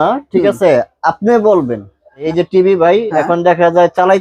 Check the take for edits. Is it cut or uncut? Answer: cut